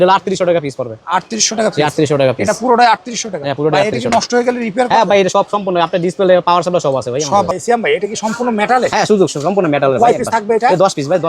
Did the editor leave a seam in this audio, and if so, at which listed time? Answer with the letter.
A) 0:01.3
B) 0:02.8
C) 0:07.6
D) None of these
C